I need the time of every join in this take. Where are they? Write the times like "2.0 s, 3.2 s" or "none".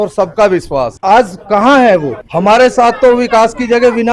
0.9 s, 2.2 s